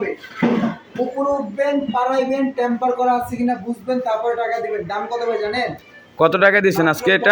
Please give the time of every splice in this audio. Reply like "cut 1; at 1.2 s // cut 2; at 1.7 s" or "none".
none

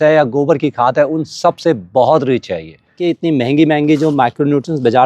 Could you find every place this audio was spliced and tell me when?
cut 1; at 3.0 s

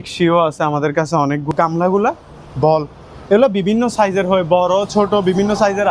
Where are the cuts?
cut 1; at 1.5 s

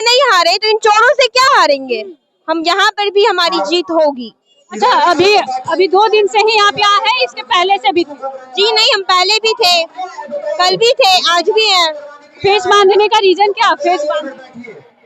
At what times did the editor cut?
none

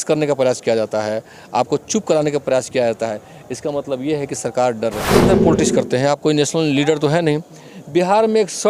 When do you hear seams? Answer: cut 1; at 5.1 s

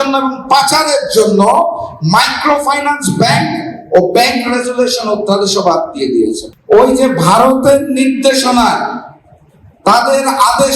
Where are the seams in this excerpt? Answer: cut 1; at 6.4 s

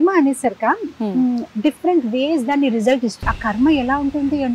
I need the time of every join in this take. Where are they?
cut 1; at 3.3 s

